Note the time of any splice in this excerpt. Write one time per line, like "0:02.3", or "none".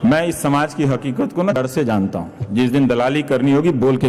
0:01.6